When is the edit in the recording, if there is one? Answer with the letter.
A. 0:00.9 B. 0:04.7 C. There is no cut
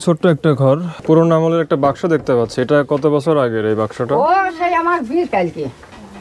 A